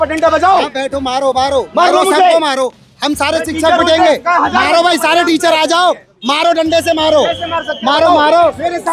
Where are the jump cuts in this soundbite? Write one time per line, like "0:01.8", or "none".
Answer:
none